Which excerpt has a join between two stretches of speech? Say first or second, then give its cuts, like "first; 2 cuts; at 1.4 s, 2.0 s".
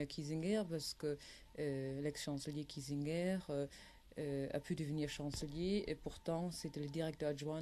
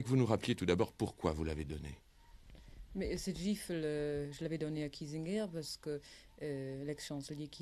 first; 1 cut; at 5.5 s